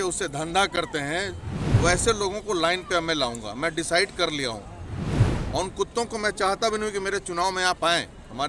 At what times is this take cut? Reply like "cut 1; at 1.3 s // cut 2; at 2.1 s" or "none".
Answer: cut 1; at 1.5 s

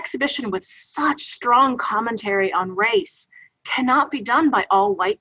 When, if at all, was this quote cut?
none

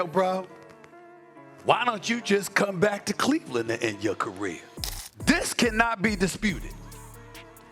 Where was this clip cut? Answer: cut 1; at 4.9 s

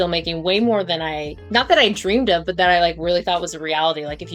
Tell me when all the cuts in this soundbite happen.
none

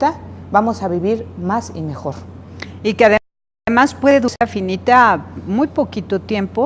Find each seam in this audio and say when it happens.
none

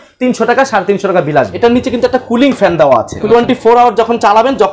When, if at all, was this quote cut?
cut 1; at 1.5 s // cut 2; at 3.2 s

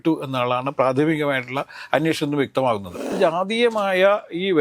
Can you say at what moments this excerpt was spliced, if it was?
cut 1; at 3.2 s

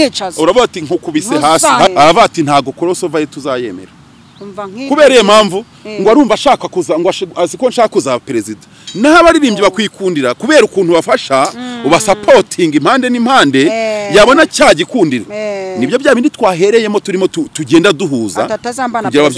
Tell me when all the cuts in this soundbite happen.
cut 1; at 1.9 s

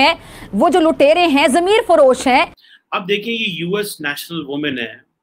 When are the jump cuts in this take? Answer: cut 1; at 2.6 s

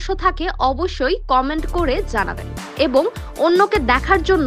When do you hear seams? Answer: none

